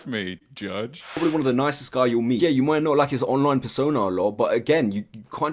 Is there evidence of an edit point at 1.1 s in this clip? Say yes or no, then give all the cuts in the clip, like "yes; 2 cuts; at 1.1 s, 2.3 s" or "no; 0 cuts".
yes; 1 cut; at 1.1 s